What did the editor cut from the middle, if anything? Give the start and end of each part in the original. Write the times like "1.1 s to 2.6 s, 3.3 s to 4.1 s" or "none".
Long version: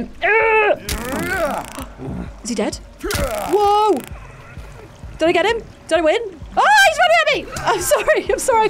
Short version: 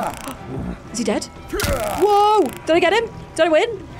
4.1 s to 5.1 s